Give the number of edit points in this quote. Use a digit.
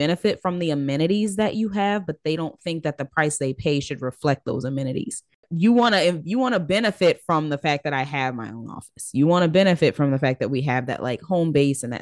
1